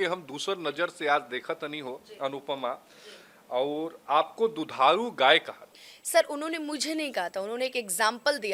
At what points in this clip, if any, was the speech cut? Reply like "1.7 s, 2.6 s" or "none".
none